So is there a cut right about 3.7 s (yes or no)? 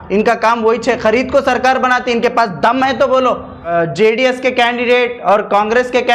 yes